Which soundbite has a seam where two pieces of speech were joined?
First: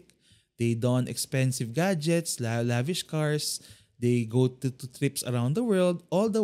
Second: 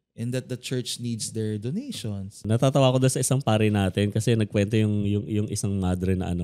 second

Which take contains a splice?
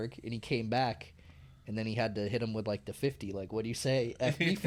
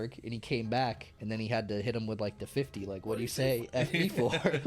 second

